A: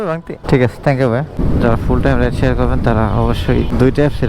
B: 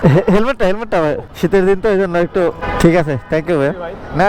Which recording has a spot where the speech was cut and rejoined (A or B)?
A